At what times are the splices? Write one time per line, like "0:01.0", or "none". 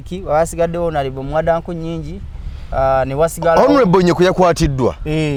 none